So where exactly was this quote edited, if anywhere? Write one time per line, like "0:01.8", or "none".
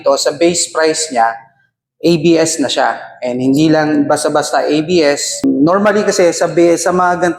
0:05.4